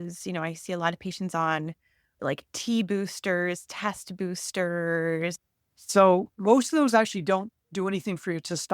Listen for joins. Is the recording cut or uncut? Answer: cut